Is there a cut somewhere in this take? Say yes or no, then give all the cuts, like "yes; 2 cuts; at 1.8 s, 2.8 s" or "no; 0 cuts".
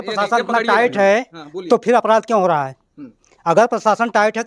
no; 0 cuts